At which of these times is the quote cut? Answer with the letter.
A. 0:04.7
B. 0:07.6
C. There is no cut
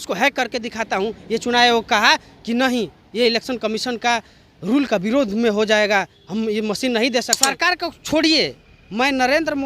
B